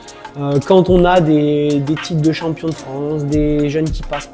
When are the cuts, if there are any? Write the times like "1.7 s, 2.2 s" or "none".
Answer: none

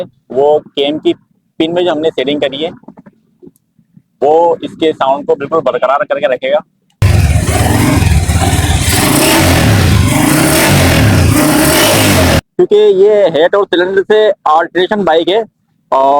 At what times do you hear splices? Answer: 7.1 s, 12.4 s

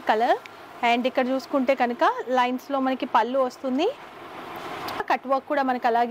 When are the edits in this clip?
5.0 s

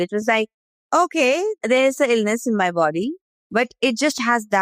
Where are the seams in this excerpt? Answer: 3.3 s

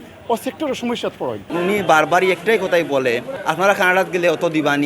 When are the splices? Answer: 1.4 s, 3.4 s

